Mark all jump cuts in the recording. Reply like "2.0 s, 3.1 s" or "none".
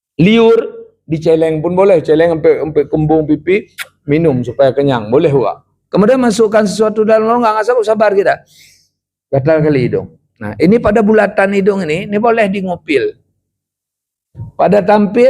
5.8 s